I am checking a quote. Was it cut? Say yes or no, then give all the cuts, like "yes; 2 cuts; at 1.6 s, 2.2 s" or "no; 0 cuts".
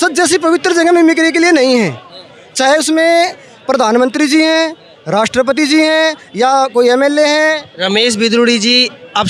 no; 0 cuts